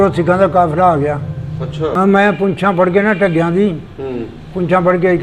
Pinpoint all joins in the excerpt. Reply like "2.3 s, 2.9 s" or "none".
1.9 s